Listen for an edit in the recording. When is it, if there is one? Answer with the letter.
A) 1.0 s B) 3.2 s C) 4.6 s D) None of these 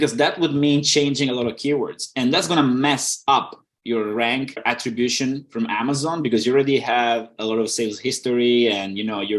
C